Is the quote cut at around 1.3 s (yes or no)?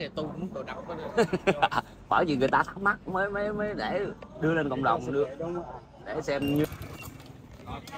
no